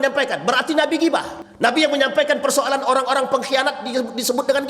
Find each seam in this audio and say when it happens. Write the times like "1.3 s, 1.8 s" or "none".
1.4 s